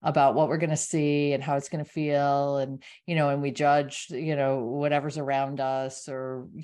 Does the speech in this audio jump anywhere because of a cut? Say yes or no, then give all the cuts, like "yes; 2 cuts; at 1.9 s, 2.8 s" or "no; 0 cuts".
no; 0 cuts